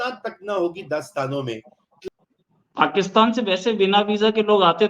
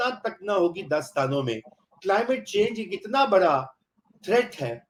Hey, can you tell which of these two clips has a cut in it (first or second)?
first